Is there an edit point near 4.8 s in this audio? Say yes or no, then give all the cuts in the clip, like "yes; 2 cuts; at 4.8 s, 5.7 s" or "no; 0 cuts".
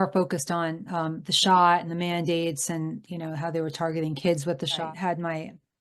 yes; 1 cut; at 4.8 s